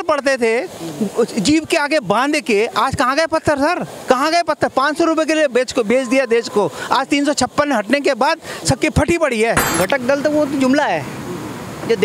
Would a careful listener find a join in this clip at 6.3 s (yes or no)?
no